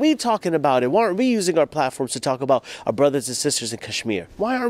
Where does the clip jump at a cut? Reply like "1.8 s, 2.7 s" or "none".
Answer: none